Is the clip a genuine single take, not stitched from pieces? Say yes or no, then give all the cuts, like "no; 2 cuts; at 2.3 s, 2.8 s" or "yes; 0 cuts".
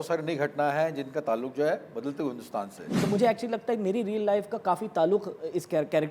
no; 1 cut; at 3.1 s